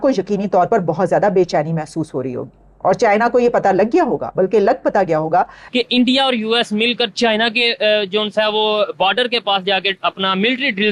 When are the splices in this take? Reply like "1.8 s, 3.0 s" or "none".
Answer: 5.6 s